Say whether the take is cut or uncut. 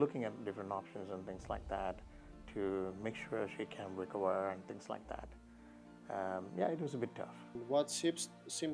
uncut